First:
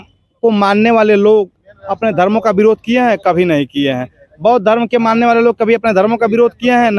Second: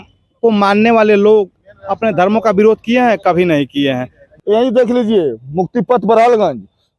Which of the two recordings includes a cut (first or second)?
second